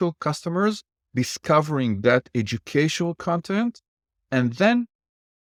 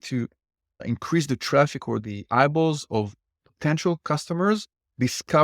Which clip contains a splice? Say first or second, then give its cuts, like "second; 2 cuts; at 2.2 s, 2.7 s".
second; 2 cuts; at 0.8 s, 2.0 s